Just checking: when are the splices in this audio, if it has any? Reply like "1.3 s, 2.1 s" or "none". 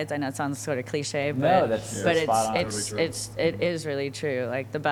none